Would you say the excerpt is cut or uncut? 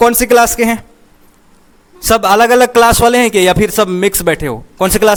uncut